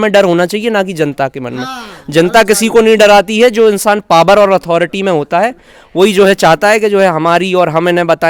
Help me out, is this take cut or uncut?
uncut